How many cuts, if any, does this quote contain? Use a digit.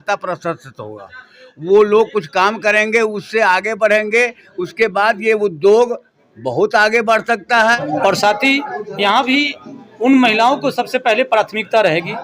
1